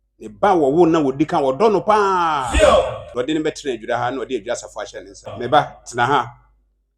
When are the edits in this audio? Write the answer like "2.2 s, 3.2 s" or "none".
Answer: 3.0 s, 5.4 s